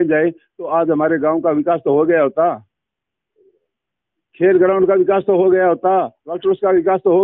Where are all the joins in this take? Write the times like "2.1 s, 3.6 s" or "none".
none

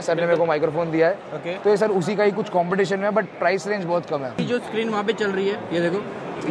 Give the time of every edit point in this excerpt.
4.5 s

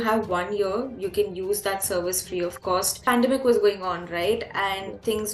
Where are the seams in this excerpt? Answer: 2.9 s

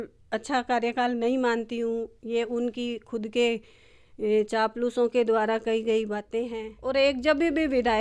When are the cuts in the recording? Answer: 6.7 s

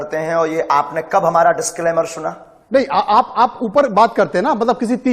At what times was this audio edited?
2.6 s

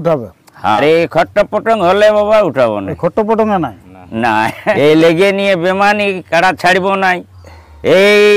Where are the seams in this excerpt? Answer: 0.8 s, 4.8 s

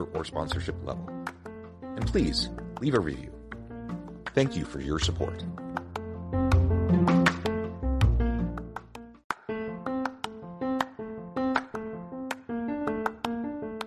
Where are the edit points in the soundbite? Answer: 9.1 s

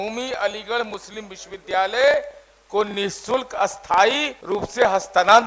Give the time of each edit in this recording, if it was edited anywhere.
4.3 s

